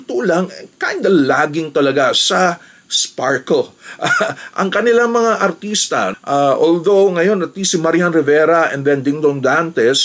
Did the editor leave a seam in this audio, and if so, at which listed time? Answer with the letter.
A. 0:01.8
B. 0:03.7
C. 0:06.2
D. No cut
D